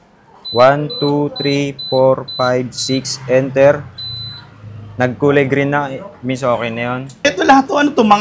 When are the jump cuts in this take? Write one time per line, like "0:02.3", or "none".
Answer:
0:07.2

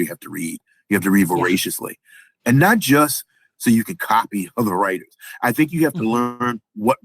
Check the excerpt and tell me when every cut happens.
0:02.4

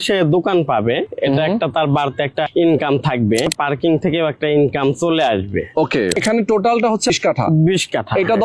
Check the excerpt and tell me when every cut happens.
0:02.5
0:03.5
0:06.1
0:07.1

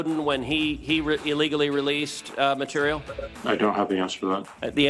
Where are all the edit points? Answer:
none

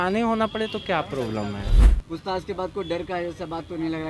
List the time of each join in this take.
0:01.7

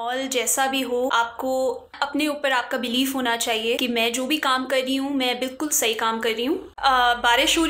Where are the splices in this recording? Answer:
0:01.1
0:01.9
0:03.8
0:06.7

